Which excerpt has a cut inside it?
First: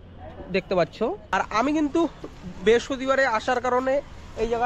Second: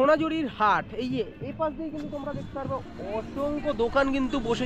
first; 1 cut; at 1.2 s

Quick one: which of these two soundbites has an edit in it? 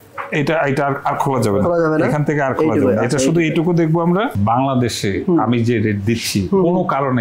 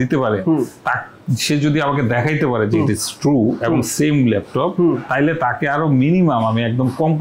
first; 1 cut; at 4.3 s

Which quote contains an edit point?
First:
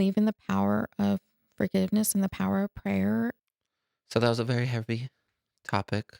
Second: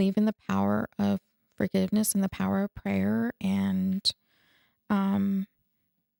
first; 1 cut; at 3.4 s

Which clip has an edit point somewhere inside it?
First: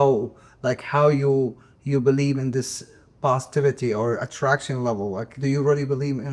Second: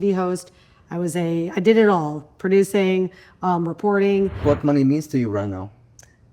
second; 1 cut; at 4.4 s

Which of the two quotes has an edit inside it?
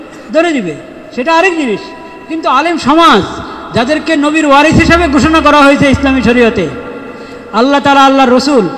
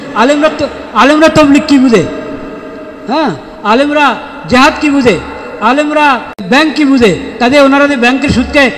second; 1 cut; at 6.6 s

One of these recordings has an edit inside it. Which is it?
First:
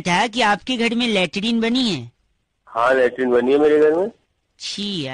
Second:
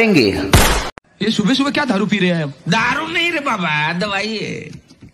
second; 1 cut; at 1.0 s

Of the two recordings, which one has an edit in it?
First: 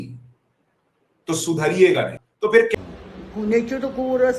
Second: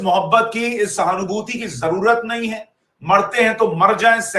first; 1 cut; at 2.9 s

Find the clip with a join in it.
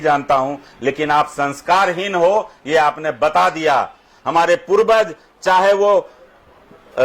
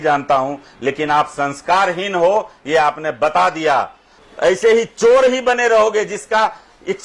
second; 1 cut; at 4.1 s

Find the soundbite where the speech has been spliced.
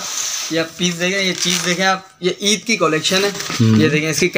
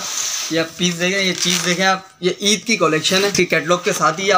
second; 1 cut; at 3.3 s

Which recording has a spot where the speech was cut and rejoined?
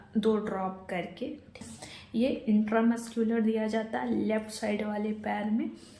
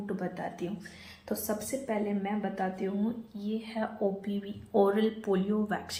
first; 1 cut; at 1.7 s

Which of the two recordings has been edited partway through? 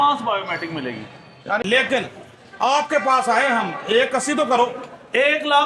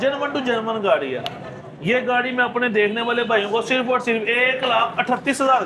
first; 1 cut; at 1.6 s

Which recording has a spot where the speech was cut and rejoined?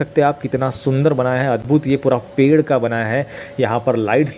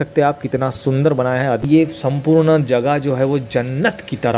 second; 1 cut; at 1.6 s

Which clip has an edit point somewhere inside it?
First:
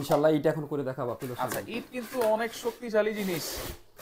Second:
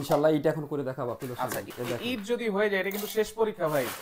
second; 1 cut; at 1.7 s

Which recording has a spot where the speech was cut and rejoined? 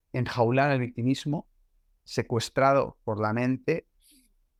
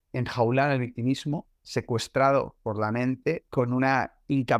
second; 2 cuts; at 1.5 s, 3.4 s

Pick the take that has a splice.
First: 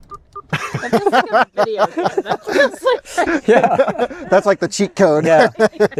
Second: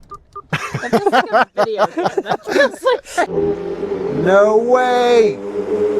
second; 1 cut; at 3.3 s

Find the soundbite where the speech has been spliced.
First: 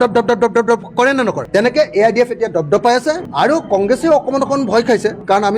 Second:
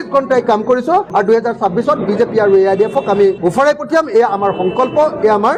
first; 1 cut; at 3.2 s

